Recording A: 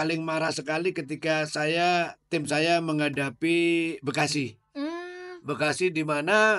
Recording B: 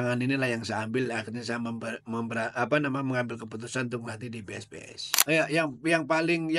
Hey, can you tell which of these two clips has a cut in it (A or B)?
B